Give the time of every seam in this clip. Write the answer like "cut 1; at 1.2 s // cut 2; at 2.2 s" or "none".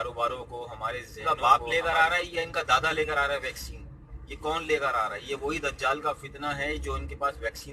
cut 1; at 1.1 s